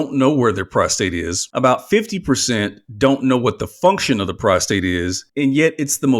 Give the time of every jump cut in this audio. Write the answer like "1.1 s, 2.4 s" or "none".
1.4 s, 5.2 s